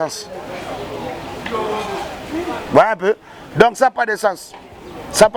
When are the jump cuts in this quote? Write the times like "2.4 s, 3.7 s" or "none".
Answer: none